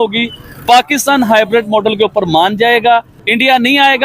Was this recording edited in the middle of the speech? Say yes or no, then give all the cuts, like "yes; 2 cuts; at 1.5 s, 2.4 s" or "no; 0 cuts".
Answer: yes; 1 cut; at 3.1 s